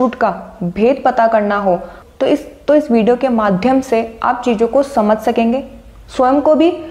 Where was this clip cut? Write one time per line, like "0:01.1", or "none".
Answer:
none